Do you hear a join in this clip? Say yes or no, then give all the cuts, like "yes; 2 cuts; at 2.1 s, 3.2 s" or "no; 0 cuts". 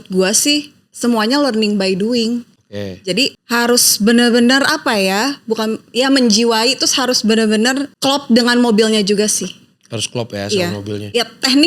no; 0 cuts